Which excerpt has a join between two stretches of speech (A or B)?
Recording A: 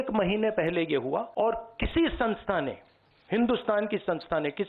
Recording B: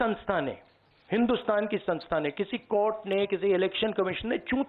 A